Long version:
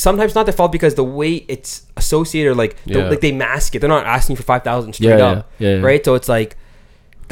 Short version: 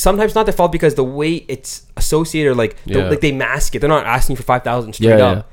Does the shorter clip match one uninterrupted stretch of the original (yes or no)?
yes